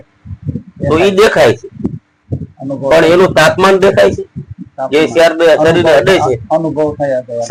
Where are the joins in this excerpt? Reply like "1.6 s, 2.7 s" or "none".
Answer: none